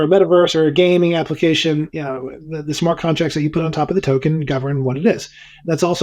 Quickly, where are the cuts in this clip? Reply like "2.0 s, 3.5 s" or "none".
none